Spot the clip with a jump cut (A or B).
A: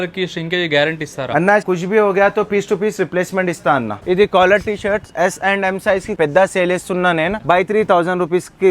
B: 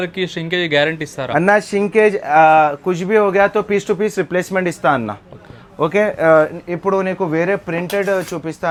A